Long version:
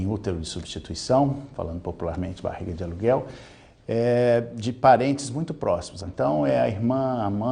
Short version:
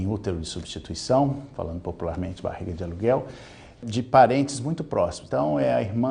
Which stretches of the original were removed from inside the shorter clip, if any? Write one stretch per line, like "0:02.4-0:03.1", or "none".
0:03.8-0:04.5
0:05.9-0:06.1

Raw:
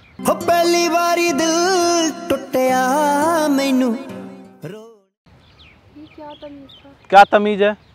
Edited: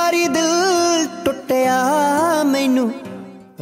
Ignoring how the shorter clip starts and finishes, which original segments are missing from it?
none

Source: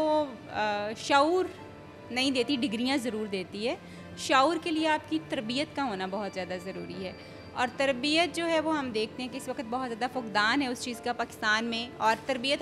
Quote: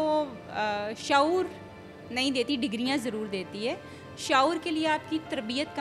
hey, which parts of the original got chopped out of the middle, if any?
none

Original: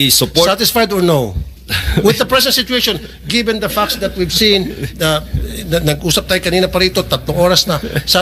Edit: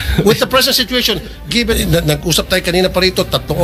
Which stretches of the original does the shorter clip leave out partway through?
0:03.6-0:05.6

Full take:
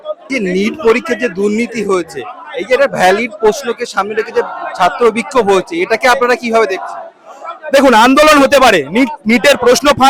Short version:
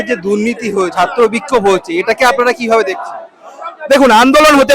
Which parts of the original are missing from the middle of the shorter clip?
0:02.0-0:04.7

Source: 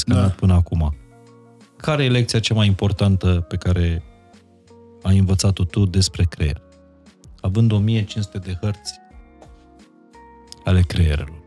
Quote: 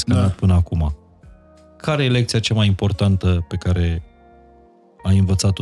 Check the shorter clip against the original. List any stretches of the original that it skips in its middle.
none

